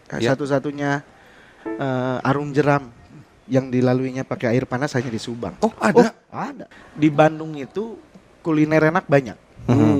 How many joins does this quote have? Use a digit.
1